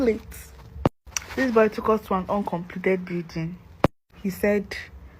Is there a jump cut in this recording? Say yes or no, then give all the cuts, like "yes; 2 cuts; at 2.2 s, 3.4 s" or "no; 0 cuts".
yes; 1 cut; at 4.1 s